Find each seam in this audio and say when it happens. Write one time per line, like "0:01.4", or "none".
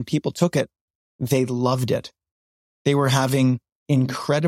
none